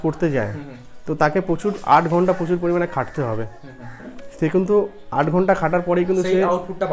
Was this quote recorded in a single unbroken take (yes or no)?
yes